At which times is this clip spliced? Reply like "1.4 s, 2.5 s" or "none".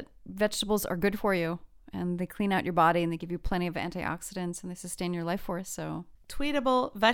none